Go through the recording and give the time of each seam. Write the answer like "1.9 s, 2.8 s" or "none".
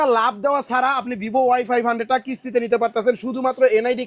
none